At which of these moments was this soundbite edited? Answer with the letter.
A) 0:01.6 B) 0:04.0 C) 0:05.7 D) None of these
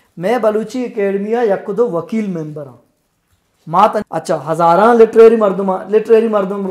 B